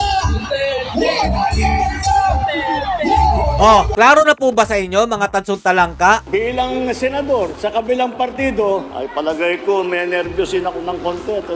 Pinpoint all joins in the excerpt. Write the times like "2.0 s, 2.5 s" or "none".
3.9 s, 6.2 s